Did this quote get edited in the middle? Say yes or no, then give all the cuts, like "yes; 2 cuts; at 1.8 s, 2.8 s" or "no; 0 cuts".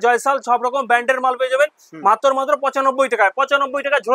no; 0 cuts